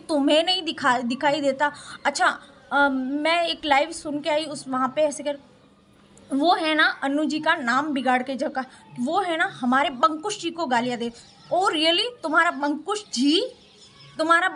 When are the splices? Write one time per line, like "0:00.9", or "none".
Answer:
none